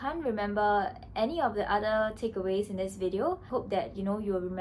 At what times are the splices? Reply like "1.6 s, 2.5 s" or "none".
3.5 s